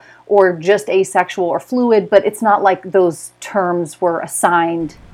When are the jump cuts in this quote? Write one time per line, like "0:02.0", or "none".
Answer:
none